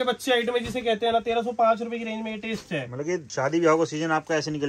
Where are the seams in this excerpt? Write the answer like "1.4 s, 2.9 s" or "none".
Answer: 3.3 s

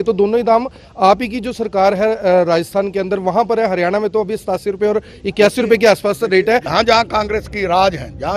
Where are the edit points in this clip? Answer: 6.7 s

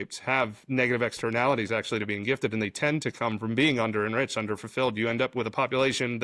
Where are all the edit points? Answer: none

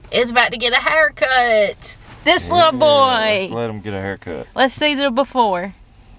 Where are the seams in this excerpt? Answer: none

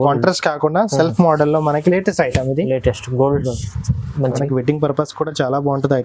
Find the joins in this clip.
4.3 s

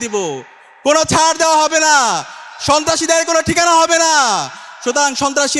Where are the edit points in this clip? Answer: none

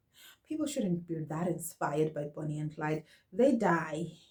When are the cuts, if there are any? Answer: none

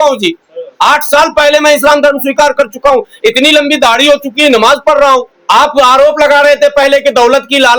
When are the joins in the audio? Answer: 5.3 s

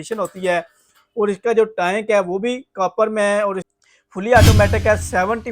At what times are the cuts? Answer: 3.7 s

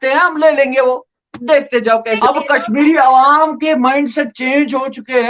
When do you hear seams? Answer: 2.2 s

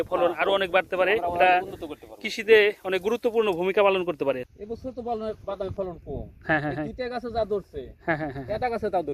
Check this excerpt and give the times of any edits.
4.4 s

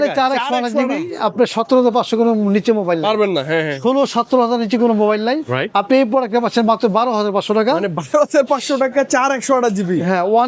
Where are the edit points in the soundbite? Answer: none

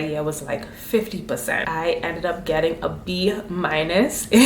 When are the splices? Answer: 1.6 s

